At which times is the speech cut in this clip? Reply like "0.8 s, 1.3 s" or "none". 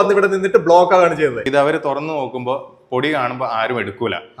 1.4 s